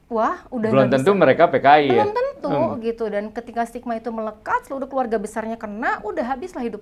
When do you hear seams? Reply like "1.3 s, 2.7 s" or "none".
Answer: none